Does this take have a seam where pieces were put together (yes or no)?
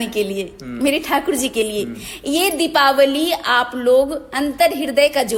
no